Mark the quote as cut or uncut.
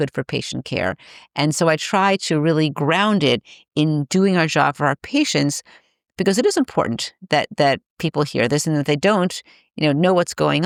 uncut